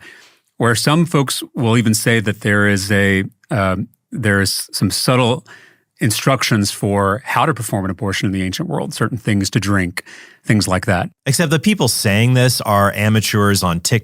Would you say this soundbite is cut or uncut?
cut